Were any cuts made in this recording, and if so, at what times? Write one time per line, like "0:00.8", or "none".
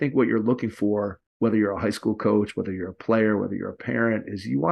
0:01.2